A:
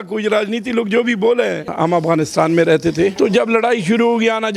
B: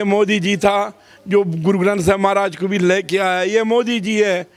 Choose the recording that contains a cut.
A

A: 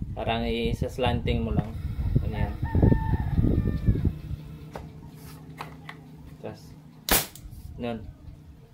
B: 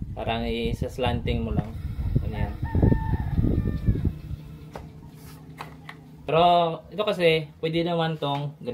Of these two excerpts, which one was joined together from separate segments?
B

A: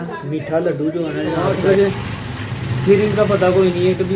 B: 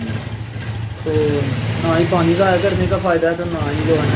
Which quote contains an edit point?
A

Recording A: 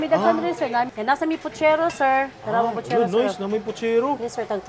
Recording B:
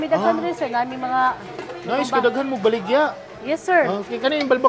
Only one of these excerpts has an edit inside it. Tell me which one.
A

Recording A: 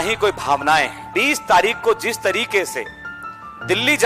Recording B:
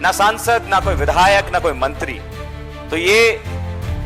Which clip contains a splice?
A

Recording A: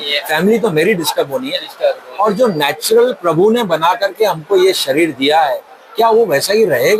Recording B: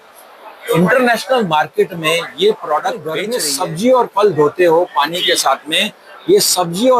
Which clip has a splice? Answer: B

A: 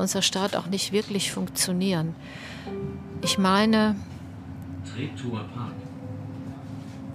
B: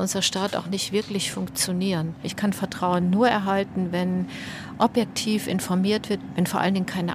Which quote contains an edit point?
B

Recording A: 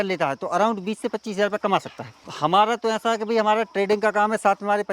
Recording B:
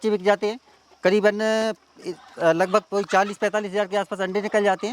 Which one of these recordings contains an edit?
A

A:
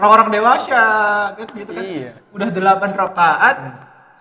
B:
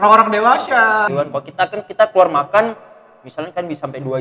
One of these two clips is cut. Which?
B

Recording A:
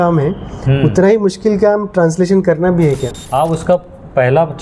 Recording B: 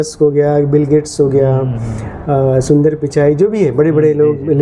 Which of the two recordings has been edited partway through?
A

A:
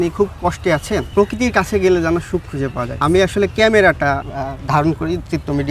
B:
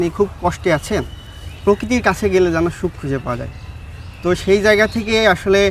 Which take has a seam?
A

